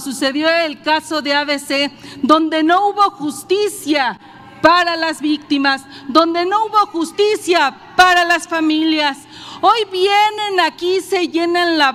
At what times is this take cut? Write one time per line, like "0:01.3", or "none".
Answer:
none